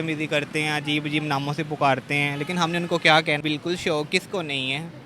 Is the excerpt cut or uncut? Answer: cut